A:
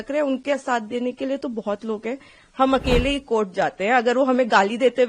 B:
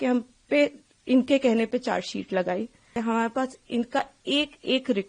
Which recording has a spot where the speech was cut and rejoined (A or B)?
B